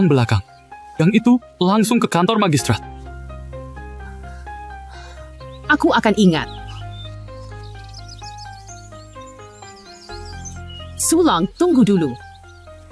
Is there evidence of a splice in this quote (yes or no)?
yes